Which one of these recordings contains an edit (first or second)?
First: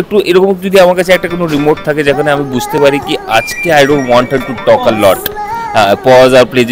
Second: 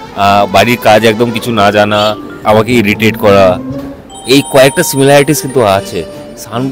second